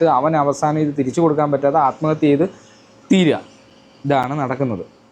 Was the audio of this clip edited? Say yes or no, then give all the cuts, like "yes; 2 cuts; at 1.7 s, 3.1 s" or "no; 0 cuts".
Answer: no; 0 cuts